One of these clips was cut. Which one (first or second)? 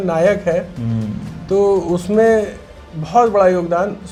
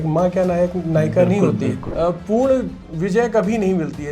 second